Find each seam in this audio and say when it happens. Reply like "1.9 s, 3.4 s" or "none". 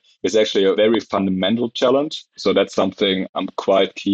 0.8 s, 2.3 s